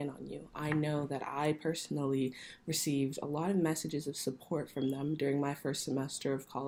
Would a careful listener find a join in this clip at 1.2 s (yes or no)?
no